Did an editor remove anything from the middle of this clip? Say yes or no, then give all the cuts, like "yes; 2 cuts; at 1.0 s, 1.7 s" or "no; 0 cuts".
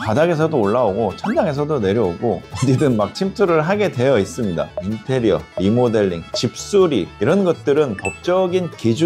yes; 1 cut; at 4.7 s